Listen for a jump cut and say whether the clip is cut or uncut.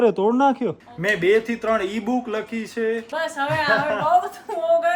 cut